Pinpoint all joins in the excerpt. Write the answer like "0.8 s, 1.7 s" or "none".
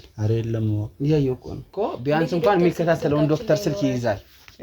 1.6 s